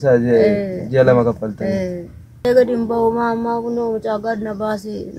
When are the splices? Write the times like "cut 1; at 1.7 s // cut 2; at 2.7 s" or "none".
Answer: cut 1; at 2.4 s